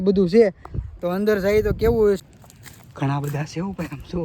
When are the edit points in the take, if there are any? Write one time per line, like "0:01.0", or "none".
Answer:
0:02.2